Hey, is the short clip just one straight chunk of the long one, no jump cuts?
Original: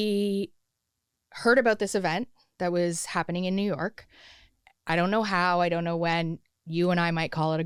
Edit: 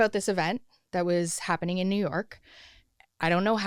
yes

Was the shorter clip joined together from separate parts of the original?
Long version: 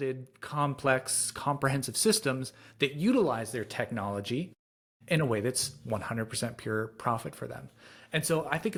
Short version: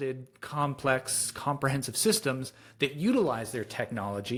no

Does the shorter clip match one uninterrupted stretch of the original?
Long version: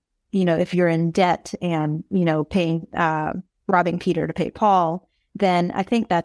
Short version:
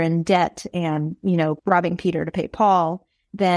no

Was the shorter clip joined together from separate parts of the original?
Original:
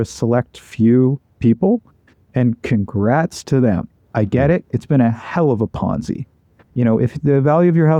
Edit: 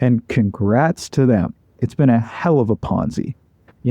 yes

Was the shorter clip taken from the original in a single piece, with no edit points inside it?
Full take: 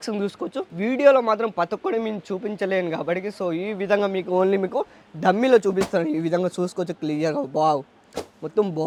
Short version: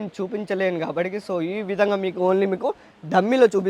yes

